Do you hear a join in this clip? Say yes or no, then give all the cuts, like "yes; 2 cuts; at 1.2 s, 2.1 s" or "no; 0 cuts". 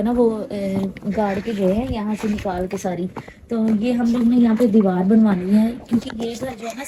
no; 0 cuts